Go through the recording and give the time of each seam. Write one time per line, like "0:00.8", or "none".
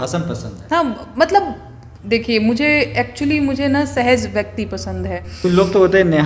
0:05.3